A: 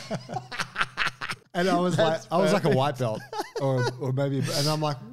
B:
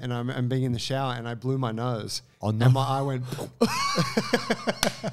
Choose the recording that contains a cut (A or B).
A